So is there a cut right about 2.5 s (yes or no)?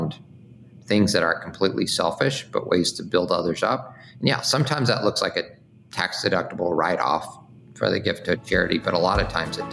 no